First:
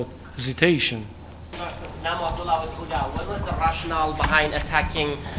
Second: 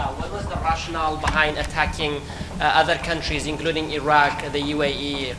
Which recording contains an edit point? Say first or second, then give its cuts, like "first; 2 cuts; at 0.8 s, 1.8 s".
first; 1 cut; at 1.6 s